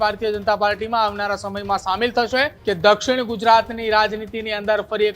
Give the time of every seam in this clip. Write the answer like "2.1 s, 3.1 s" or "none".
2.5 s